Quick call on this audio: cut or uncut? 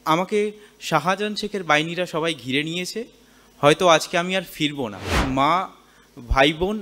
cut